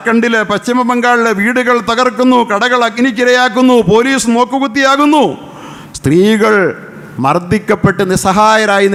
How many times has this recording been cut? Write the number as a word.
zero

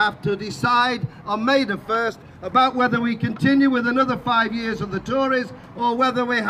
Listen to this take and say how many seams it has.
zero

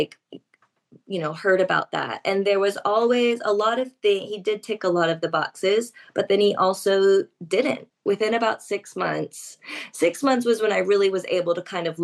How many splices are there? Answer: one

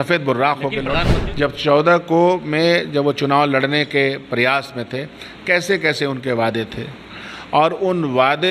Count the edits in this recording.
one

